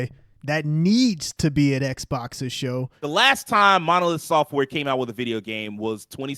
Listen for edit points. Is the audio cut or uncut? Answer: cut